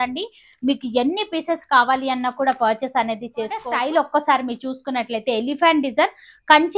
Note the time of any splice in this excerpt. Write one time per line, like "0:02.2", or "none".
0:03.7